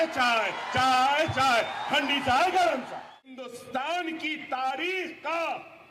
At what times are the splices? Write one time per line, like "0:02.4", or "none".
0:03.4